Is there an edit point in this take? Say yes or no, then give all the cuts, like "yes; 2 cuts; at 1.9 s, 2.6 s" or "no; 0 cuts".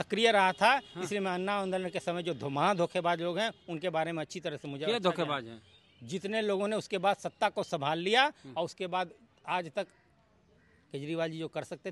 no; 0 cuts